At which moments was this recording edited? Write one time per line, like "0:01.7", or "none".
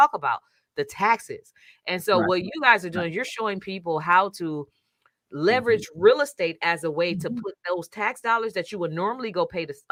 none